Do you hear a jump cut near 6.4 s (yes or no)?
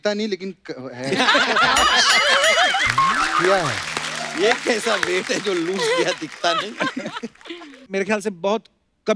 no